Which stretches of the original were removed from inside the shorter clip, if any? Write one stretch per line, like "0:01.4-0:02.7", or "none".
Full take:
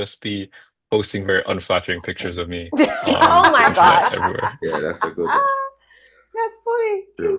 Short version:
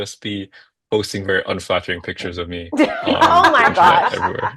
none